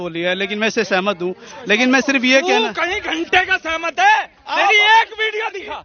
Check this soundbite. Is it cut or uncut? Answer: uncut